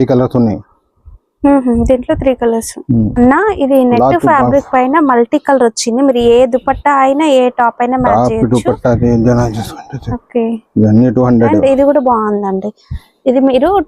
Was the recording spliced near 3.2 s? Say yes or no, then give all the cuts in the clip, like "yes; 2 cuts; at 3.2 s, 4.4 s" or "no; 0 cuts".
yes; 1 cut; at 3.2 s